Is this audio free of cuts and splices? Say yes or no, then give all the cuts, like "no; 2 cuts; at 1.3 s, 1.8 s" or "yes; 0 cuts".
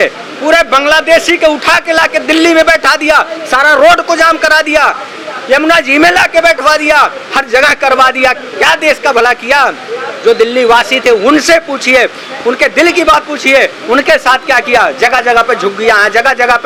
yes; 0 cuts